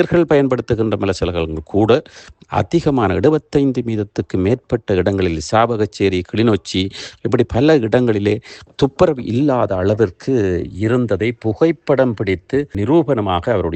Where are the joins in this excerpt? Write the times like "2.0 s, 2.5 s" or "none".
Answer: none